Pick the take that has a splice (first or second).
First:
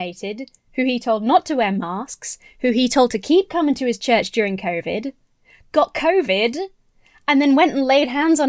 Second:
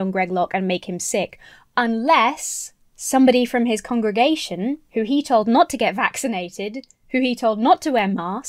second